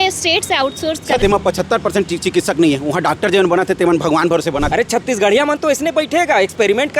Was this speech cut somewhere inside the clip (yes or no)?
yes